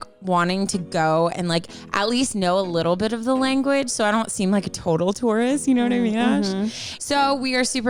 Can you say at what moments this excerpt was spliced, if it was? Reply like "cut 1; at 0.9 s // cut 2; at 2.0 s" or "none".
none

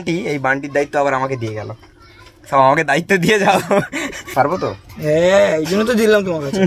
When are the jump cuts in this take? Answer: cut 1; at 4.1 s

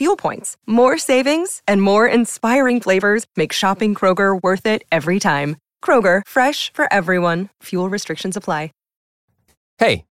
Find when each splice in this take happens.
cut 1; at 9.0 s

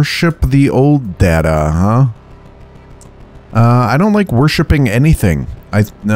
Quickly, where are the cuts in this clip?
none

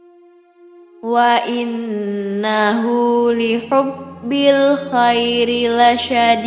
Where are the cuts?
cut 1; at 1.0 s

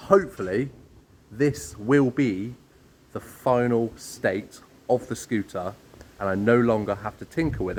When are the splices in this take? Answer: none

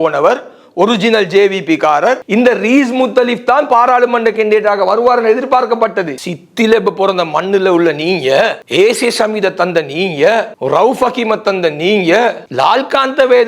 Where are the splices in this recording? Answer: cut 1; at 6.2 s

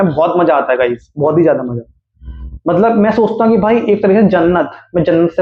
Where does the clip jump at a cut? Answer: none

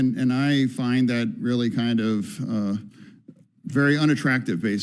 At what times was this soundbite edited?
none

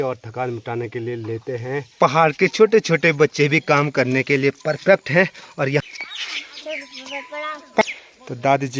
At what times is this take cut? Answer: cut 1; at 1.9 s // cut 2; at 5.9 s // cut 3; at 7.8 s

